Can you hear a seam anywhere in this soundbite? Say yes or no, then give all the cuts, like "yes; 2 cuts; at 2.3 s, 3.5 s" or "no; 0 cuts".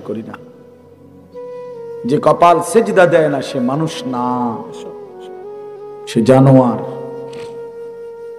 yes; 2 cuts; at 4.6 s, 6.1 s